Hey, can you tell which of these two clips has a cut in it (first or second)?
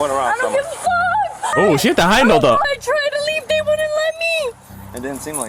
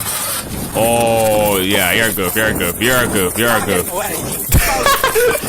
first